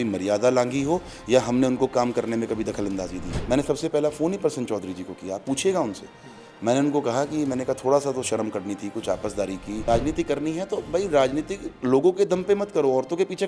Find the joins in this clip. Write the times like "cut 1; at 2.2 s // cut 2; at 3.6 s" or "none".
cut 1; at 3.3 s // cut 2; at 9.8 s